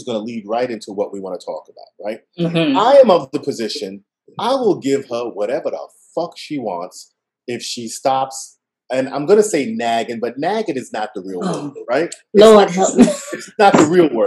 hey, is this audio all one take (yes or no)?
yes